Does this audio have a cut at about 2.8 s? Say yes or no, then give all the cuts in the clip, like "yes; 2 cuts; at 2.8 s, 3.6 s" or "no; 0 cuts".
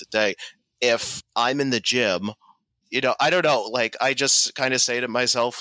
yes; 2 cuts; at 1.2 s, 2.8 s